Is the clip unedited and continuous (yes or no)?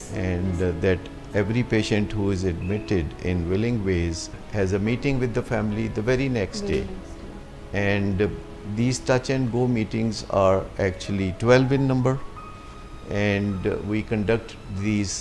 yes